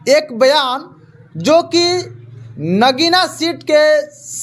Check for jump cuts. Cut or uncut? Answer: uncut